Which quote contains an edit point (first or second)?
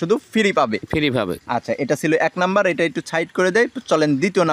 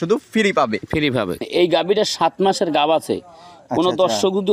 second